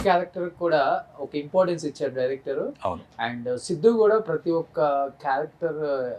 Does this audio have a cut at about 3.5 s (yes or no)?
no